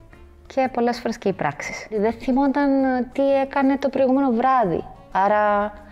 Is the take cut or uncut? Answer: cut